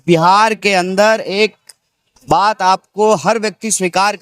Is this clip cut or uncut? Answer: uncut